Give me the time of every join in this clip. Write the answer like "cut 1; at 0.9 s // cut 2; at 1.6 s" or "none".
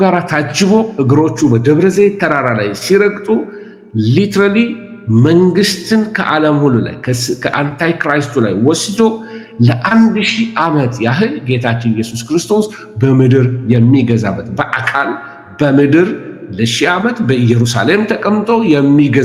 none